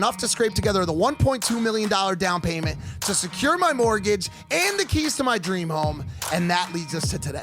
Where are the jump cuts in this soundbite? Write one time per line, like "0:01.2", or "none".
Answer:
0:04.7